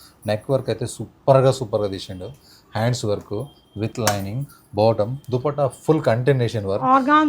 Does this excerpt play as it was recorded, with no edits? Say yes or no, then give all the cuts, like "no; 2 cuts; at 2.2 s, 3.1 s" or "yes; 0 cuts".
yes; 0 cuts